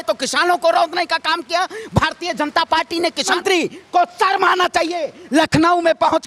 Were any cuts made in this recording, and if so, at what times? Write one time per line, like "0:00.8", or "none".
0:03.3